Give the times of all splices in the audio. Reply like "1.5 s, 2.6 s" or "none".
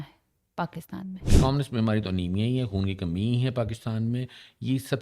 1.3 s